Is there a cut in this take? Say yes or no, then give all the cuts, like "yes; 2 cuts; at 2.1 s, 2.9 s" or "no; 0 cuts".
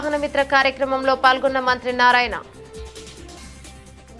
yes; 1 cut; at 2.8 s